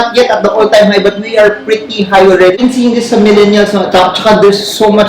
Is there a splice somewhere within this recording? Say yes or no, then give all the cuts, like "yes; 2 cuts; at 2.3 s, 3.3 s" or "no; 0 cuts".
yes; 1 cut; at 2.6 s